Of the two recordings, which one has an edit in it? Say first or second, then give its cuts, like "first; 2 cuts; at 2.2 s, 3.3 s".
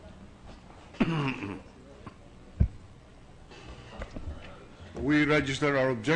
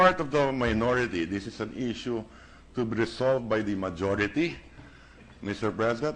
first; 1 cut; at 1.1 s